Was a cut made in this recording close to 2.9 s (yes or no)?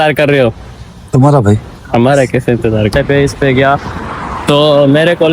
yes